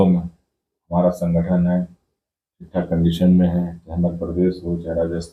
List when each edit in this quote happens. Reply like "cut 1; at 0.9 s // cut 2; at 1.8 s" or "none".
none